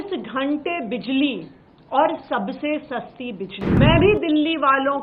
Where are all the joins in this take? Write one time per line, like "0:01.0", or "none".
0:03.8